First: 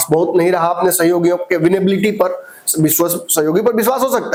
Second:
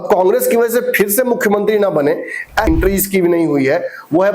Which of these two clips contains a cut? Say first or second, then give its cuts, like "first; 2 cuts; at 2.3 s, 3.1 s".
second; 1 cut; at 2.7 s